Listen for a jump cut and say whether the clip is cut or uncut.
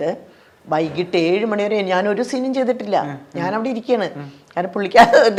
uncut